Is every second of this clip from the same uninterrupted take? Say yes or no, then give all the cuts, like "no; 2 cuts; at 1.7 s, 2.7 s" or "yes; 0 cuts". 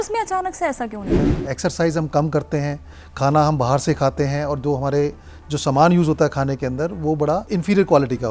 no; 2 cuts; at 1.2 s, 7.5 s